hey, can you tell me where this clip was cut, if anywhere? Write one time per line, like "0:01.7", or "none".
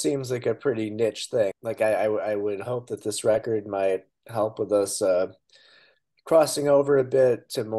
0:01.6